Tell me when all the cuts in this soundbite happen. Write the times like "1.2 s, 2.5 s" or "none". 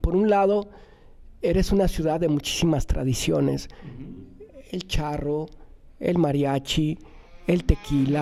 none